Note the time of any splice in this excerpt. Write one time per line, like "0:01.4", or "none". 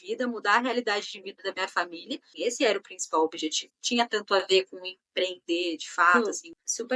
0:02.3
0:03.7
0:06.2